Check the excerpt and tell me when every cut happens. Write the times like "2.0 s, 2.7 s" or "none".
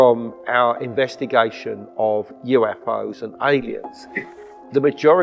4.3 s